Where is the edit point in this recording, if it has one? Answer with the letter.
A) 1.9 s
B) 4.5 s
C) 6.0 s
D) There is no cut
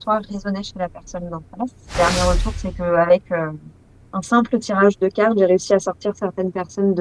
A